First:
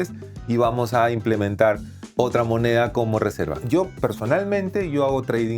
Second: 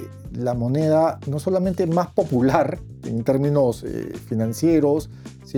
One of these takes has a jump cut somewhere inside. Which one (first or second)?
first